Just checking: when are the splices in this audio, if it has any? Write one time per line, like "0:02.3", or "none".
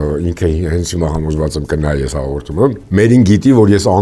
0:02.8